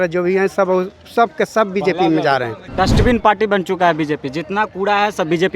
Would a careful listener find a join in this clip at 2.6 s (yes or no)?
yes